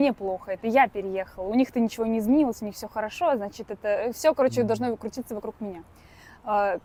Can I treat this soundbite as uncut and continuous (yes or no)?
yes